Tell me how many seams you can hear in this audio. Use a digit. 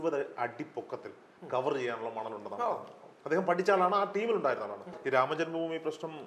1